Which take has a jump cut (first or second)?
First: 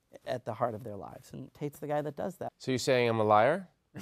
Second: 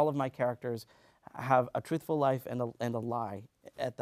first